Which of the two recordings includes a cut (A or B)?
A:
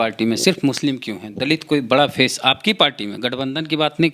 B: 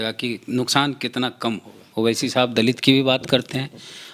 B